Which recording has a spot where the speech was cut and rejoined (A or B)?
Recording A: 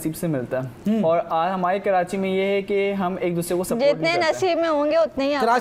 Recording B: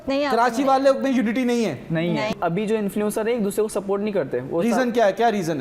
B